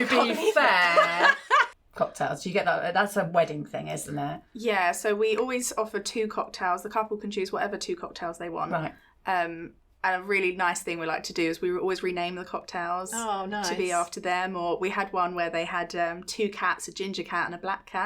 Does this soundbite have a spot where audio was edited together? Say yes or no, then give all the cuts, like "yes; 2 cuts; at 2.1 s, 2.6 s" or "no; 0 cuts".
yes; 1 cut; at 1.8 s